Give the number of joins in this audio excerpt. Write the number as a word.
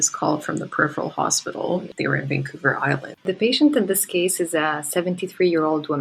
two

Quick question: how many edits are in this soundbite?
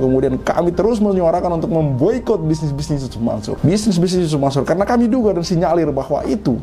one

